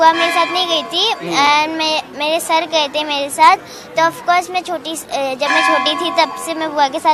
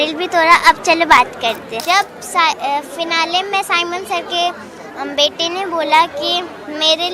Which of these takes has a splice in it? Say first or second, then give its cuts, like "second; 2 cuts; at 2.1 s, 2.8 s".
second; 1 cut; at 1.7 s